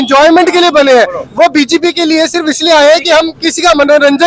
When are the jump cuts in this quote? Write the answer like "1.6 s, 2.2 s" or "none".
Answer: none